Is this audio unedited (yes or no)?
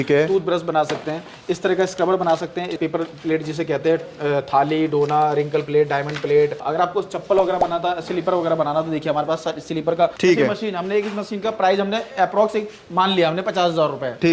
no